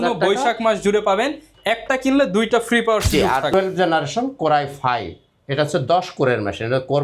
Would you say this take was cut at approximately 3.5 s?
yes; 1 cut; at 3.5 s

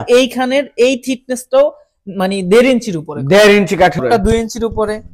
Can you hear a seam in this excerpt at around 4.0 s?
yes; 1 cut; at 4.0 s

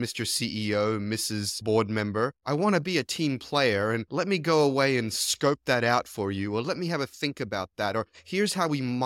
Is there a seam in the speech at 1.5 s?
yes; 1 cut; at 1.5 s

